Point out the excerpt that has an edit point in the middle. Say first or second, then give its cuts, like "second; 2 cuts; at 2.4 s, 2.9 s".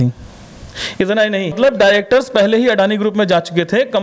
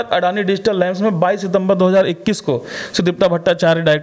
first; 1 cut; at 1.6 s